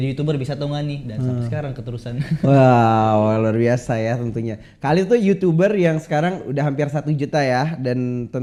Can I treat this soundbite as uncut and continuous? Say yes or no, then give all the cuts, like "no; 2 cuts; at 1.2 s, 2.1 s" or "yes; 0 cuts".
yes; 0 cuts